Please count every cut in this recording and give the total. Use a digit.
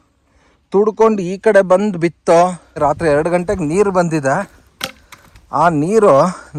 1